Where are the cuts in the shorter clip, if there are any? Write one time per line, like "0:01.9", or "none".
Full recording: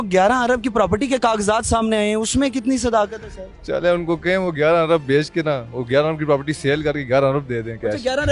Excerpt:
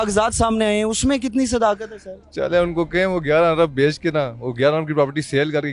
none